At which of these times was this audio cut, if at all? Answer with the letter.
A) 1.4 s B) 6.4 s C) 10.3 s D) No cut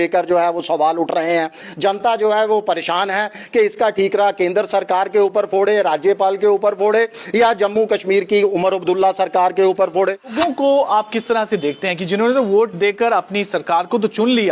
C